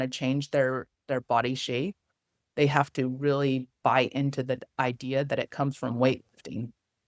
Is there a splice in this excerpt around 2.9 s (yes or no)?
no